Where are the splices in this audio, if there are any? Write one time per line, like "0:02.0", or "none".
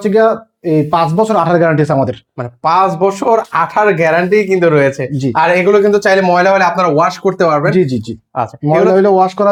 none